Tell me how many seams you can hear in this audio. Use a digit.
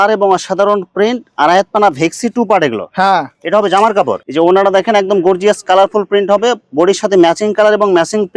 1